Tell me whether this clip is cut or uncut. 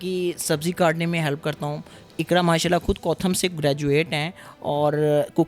uncut